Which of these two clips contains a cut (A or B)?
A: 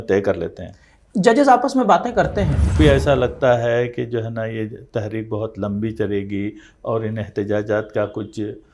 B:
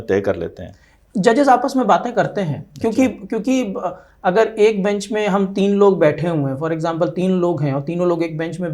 A